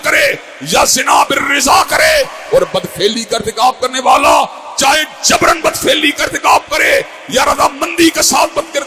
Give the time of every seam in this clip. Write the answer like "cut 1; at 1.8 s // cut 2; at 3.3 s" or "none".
none

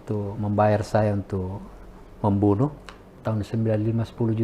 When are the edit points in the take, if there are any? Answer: cut 1; at 3.2 s

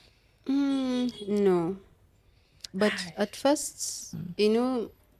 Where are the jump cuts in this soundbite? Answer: none

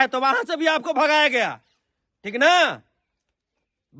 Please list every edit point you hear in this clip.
none

